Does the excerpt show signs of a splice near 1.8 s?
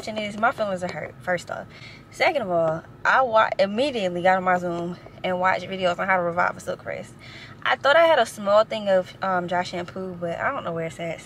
no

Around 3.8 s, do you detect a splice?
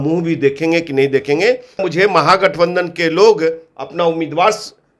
no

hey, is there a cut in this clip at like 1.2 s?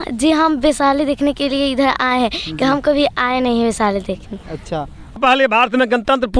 no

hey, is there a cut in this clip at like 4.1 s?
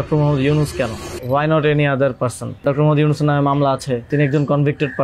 yes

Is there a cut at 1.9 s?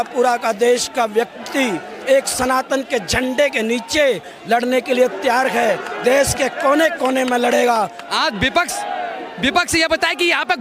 no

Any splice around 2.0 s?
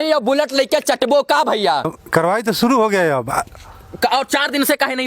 yes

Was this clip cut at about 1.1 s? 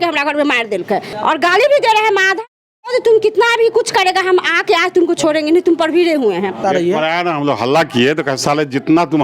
yes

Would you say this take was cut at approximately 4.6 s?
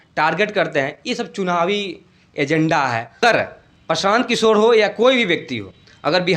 no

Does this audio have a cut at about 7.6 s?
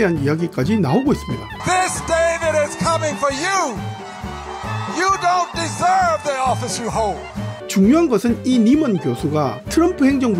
yes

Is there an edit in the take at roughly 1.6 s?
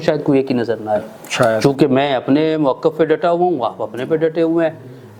yes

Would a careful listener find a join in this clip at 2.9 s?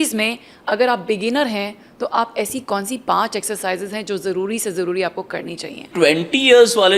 no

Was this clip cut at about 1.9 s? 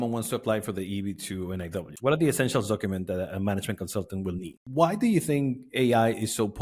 yes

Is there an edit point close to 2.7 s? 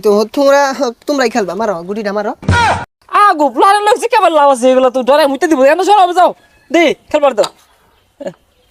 yes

